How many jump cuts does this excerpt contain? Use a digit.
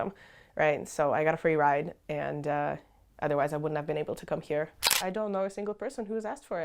1